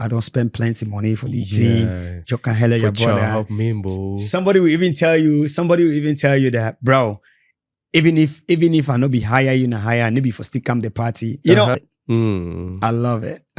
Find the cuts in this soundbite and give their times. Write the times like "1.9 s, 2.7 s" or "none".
11.8 s